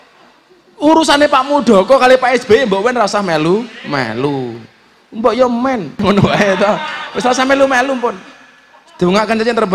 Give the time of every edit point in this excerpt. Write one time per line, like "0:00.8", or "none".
0:06.0